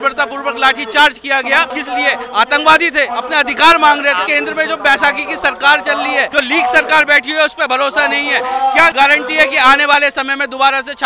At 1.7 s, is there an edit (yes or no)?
yes